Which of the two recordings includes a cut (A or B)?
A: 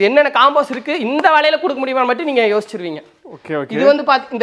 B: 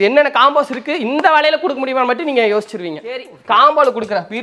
B